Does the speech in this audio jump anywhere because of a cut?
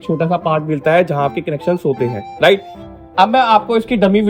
no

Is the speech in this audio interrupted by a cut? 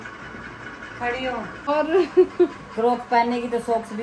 yes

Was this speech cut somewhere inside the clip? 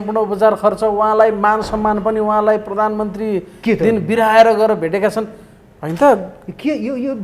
no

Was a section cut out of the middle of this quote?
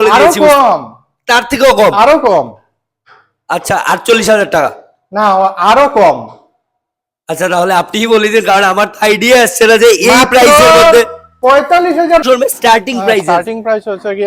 yes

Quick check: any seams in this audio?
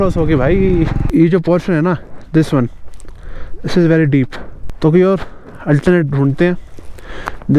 yes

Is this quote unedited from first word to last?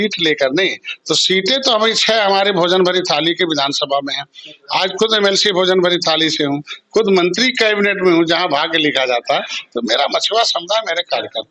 yes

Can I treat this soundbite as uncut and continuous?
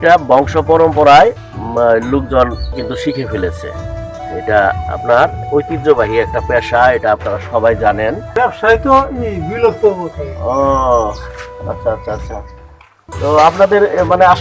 no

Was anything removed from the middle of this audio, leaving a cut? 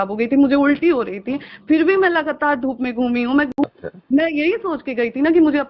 yes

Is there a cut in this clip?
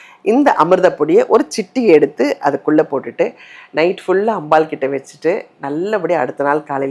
no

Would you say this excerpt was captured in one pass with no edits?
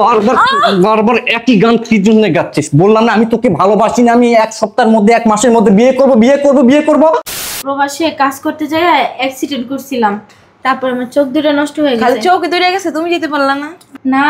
no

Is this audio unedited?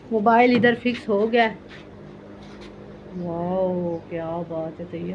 yes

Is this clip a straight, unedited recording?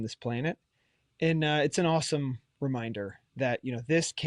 yes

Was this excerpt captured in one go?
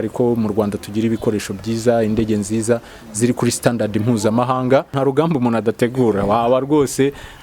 no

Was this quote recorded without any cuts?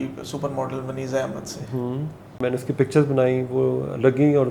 no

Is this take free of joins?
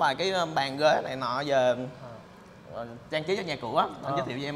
yes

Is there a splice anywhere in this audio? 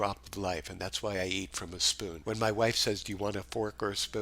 yes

